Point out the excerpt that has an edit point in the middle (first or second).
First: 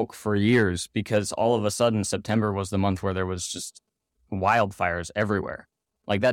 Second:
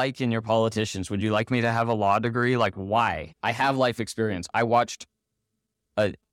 second